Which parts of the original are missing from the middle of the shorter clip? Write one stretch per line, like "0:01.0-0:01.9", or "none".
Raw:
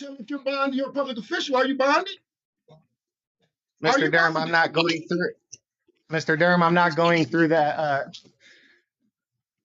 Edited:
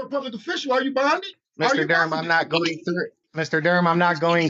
0:02.2-0:03.6
0:05.4-0:06.0